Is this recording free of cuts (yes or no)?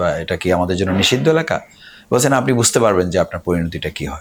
yes